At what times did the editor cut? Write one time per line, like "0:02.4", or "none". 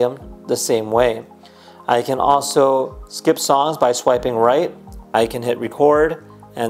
0:04.9